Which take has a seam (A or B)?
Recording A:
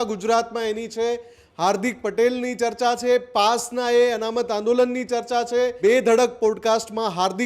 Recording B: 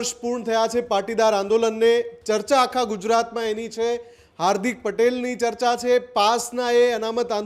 A